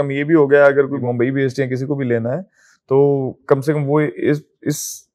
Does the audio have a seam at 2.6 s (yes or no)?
no